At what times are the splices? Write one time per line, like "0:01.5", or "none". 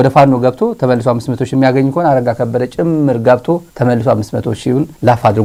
none